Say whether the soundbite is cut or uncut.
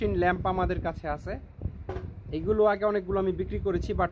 uncut